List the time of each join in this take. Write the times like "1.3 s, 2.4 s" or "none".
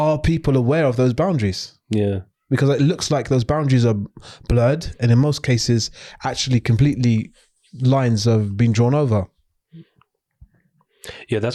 none